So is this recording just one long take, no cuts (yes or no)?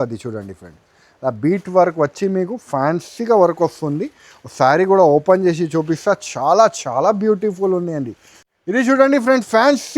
no